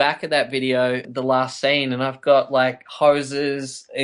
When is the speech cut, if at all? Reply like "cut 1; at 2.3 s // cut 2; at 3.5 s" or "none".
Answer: cut 1; at 1.1 s

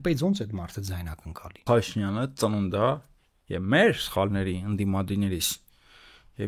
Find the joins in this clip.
cut 1; at 1.7 s

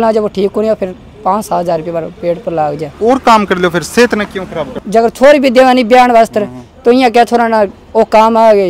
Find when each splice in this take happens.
cut 1; at 2.9 s // cut 2; at 4.6 s

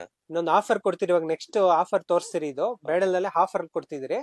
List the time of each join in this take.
none

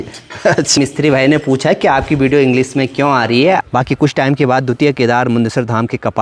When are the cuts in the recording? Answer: cut 1; at 0.8 s // cut 2; at 3.6 s

